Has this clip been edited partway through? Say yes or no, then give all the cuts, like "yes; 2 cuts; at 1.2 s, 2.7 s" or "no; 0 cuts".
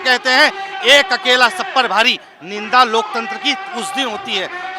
no; 0 cuts